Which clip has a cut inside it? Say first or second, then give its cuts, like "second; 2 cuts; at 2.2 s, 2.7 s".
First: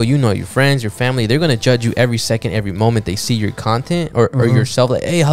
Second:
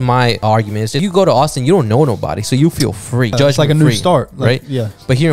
second; 2 cuts; at 1.0 s, 3.4 s